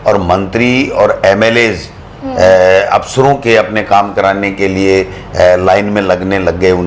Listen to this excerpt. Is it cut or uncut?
uncut